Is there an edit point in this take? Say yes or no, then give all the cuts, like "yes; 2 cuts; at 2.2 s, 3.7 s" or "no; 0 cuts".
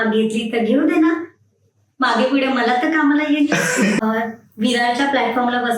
yes; 1 cut; at 4.0 s